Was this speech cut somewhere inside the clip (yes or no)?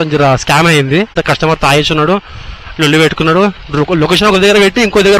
yes